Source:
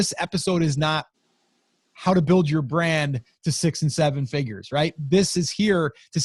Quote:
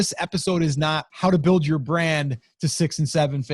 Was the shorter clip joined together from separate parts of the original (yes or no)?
yes